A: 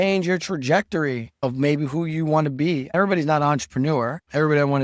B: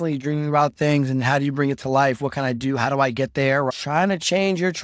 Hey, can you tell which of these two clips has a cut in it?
A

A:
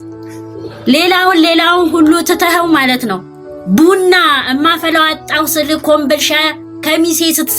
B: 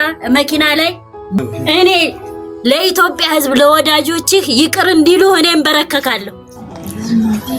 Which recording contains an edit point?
B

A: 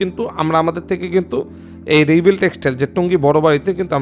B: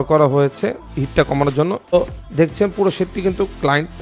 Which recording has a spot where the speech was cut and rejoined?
B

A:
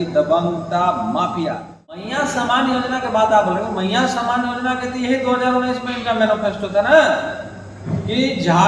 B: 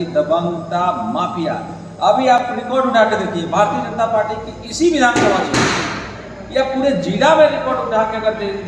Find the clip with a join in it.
A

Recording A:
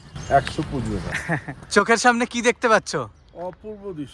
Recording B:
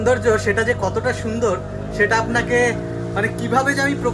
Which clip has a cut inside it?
A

